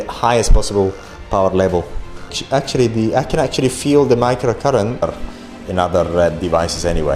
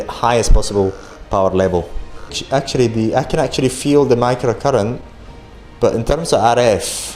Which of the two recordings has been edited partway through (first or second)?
first